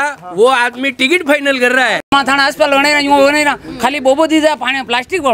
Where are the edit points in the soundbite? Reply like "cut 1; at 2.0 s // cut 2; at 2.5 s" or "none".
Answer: cut 1; at 2.0 s